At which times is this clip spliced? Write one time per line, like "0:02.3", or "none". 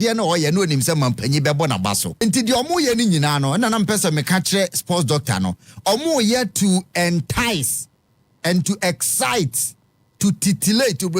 0:02.2